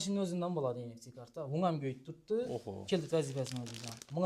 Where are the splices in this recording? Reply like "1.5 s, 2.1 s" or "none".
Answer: none